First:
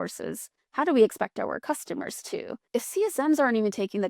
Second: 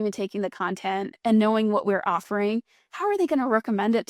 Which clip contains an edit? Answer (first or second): first